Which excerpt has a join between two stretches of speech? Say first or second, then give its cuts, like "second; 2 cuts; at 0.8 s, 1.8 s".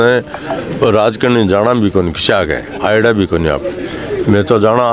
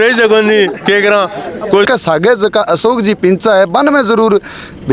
second; 1 cut; at 1.9 s